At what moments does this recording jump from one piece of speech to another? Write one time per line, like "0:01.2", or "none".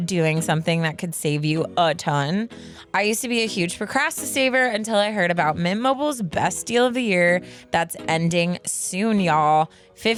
none

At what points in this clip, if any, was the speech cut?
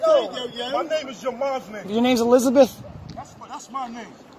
0:01.9

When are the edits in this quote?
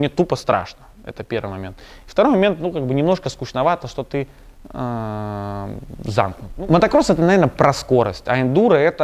none

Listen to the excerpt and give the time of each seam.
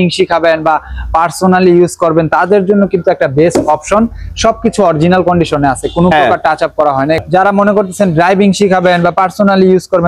0:07.2

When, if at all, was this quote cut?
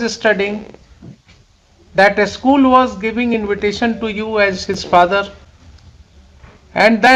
none

